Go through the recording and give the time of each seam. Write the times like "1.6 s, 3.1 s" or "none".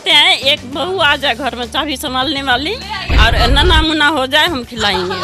none